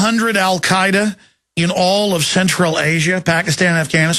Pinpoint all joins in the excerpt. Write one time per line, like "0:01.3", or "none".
none